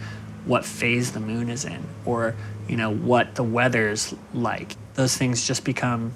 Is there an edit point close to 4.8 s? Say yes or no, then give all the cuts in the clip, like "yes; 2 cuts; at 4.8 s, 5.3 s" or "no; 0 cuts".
yes; 1 cut; at 4.8 s